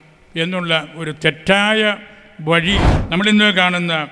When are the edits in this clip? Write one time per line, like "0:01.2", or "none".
0:02.9